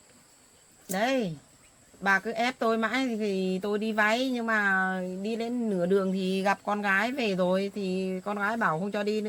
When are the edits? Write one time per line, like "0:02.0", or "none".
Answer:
none